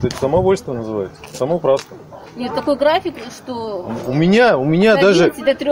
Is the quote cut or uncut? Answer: uncut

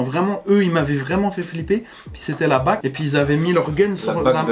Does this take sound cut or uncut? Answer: uncut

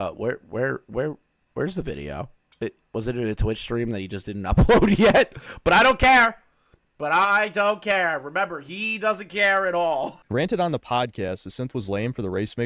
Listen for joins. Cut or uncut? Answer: cut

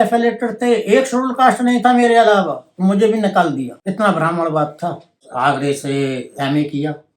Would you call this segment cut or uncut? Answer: cut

